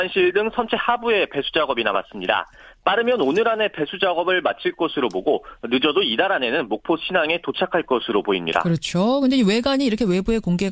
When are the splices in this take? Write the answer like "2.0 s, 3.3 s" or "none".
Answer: 2.8 s